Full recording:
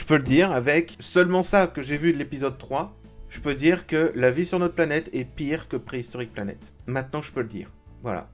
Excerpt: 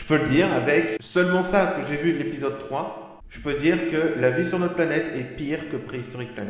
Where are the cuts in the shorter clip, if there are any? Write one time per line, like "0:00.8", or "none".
none